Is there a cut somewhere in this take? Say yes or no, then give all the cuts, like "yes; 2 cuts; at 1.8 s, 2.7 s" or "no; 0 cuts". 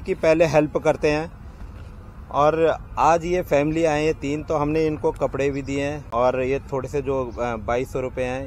no; 0 cuts